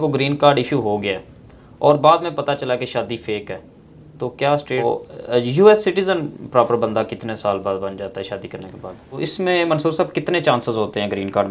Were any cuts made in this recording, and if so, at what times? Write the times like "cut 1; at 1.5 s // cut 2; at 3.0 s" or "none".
cut 1; at 4.8 s // cut 2; at 9.2 s